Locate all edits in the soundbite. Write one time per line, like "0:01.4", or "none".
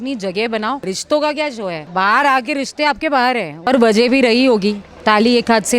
0:00.9
0:01.8
0:03.7
0:04.9